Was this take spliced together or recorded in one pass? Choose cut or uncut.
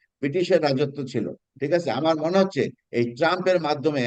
uncut